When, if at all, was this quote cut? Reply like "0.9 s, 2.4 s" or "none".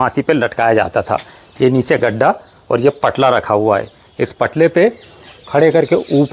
none